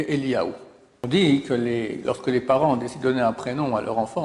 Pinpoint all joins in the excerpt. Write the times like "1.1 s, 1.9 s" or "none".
1.0 s